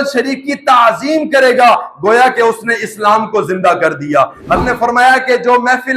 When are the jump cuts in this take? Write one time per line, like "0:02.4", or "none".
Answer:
0:04.6